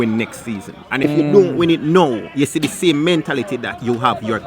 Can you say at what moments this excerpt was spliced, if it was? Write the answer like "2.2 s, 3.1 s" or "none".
1.0 s